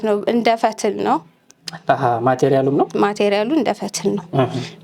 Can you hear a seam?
no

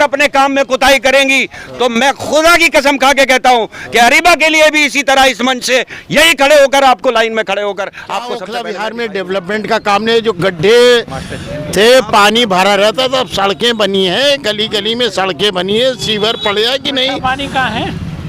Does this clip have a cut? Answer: yes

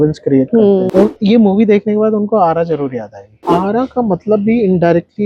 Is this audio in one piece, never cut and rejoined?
no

